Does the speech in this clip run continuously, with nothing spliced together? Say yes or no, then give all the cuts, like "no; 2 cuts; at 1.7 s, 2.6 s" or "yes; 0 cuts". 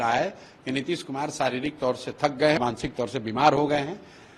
no; 1 cut; at 2.6 s